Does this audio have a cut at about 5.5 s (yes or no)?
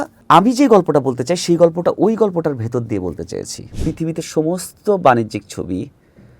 no